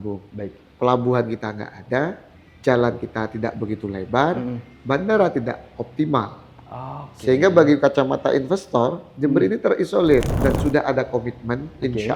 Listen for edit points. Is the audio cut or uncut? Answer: cut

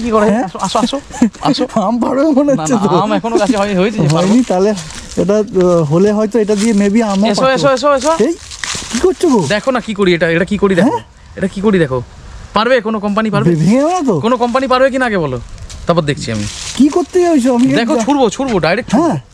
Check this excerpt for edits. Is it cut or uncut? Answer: uncut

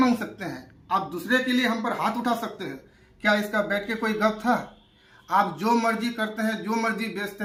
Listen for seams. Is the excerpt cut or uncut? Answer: uncut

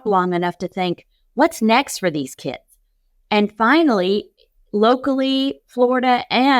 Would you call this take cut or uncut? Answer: uncut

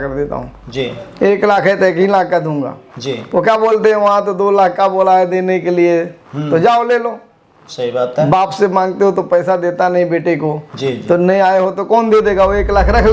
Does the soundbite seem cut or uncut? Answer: uncut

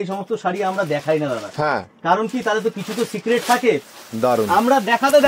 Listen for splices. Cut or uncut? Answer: cut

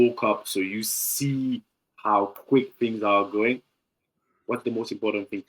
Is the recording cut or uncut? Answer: uncut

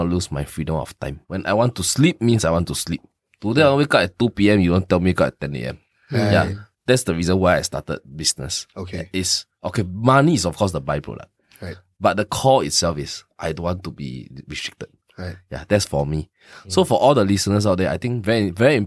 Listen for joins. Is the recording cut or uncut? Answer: cut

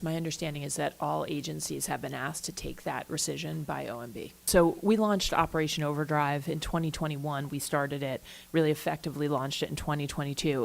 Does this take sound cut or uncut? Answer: cut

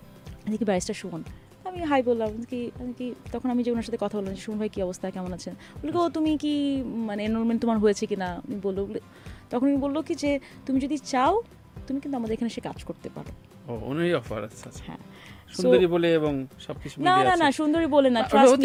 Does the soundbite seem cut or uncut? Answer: uncut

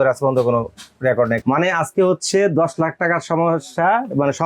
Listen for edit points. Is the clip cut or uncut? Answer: cut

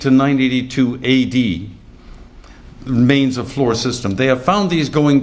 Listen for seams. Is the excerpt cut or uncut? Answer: uncut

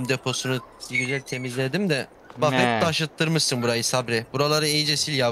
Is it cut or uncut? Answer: uncut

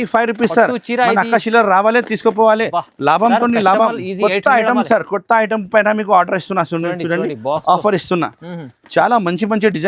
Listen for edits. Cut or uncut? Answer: uncut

